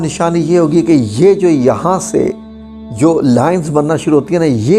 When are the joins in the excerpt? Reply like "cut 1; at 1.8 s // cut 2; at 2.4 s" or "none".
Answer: none